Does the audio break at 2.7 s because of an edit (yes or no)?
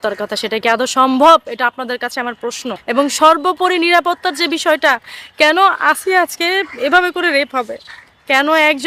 yes